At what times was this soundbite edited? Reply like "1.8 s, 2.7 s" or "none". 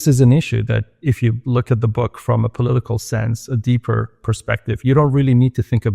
0.9 s, 4.2 s